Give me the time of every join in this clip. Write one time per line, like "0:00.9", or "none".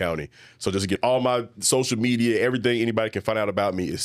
0:01.0

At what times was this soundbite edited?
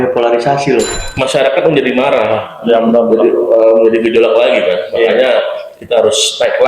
0:00.9

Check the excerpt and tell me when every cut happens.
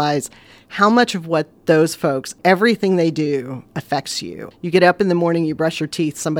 0:01.5
0:02.3
0:04.3

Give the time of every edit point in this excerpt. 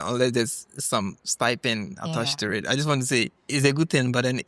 0:03.4

